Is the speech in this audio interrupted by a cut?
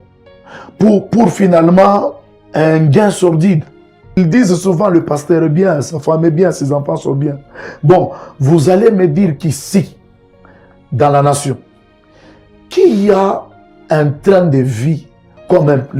yes; 1 cut; at 4.2 s

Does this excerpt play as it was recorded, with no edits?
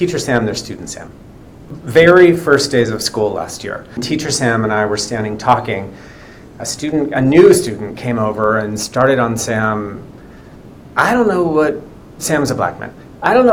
no; 2 cuts; at 1.7 s, 4.0 s

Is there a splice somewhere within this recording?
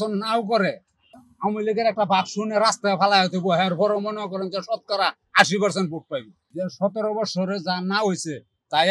yes; 2 cuts; at 1.2 s, 6.4 s

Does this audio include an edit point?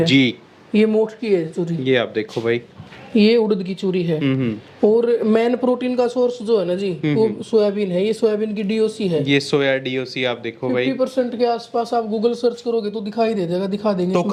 no; 0 cuts

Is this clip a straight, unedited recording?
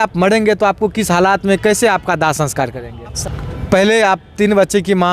no; 1 cut; at 3.2 s

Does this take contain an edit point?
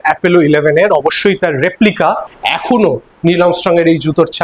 yes; 1 cut; at 2.3 s

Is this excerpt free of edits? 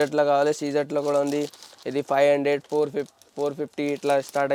yes; 0 cuts

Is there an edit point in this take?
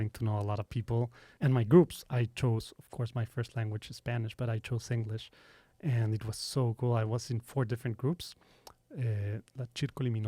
yes; 1 cut; at 1.2 s

